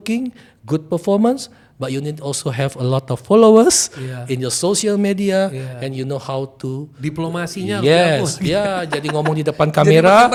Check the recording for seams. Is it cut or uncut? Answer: uncut